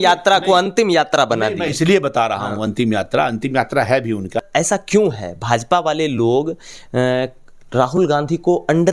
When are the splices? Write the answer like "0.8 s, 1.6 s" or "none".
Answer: 4.4 s

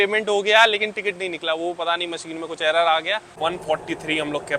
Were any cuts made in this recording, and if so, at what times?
3.3 s

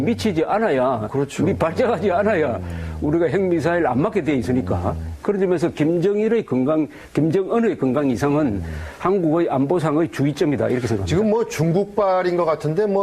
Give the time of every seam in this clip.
7.4 s

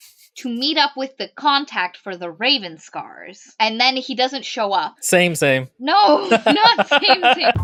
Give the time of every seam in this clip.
none

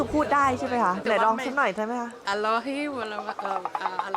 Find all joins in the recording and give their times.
1.0 s, 2.2 s

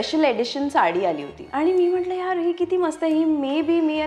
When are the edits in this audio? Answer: 1.4 s

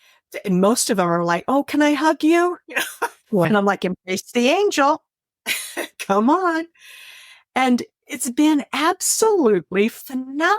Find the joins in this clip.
3.5 s

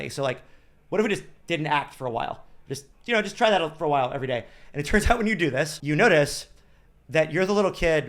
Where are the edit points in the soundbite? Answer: 5.8 s

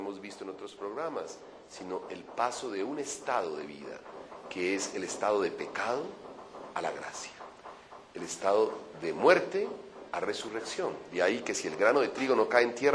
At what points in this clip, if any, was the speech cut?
11.1 s

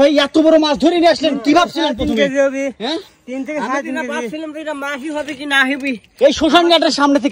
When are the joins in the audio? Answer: none

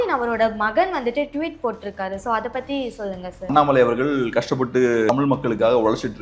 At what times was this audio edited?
3.5 s, 5.1 s

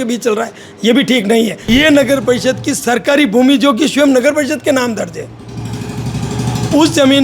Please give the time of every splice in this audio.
1.6 s

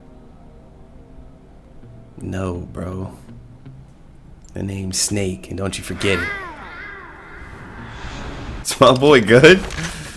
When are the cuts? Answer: 8.6 s

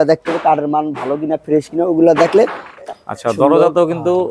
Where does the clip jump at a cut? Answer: 2.8 s

